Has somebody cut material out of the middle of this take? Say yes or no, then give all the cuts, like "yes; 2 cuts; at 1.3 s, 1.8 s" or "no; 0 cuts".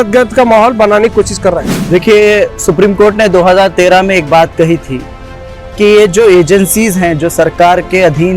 yes; 1 cut; at 1.7 s